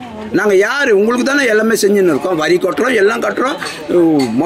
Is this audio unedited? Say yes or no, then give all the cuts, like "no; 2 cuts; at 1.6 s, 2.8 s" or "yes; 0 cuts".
yes; 0 cuts